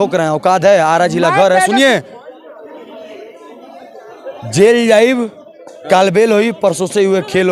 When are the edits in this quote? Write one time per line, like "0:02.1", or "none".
none